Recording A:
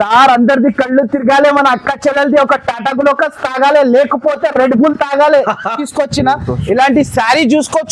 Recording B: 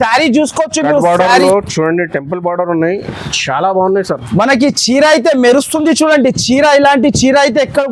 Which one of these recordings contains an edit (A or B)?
A